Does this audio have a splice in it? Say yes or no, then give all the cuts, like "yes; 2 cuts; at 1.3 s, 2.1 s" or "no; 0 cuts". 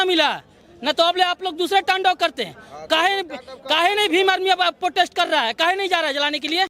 no; 0 cuts